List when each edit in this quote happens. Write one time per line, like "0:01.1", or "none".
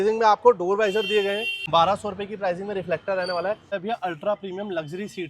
0:01.5
0:03.7

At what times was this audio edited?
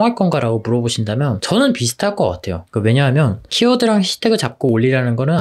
none

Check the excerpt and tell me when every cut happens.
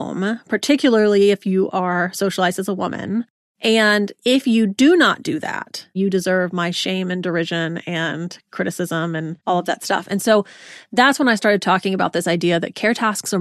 0:03.8
0:06.0
0:09.3

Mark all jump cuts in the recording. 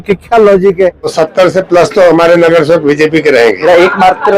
0:01.1
0:03.6

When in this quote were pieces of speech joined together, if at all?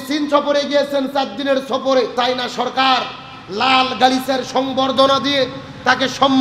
0:02.1

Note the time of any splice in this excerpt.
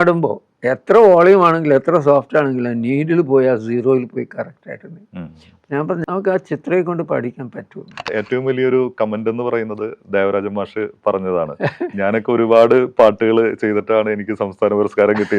0:06.0
0:08.1

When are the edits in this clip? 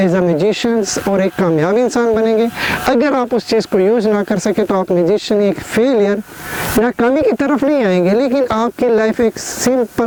none

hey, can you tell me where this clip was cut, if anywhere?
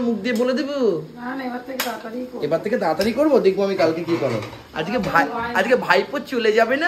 none

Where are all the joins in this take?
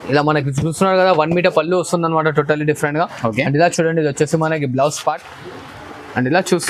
none

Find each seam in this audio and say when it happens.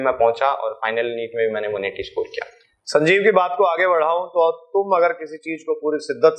none

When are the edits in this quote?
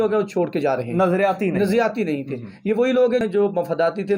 0:03.2

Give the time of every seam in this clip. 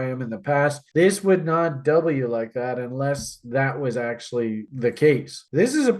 0:04.7

